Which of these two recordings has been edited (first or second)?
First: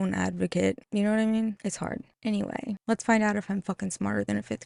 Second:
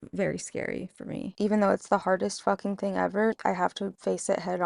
second